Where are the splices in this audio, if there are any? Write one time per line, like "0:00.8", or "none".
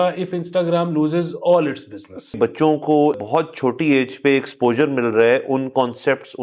0:02.3
0:03.2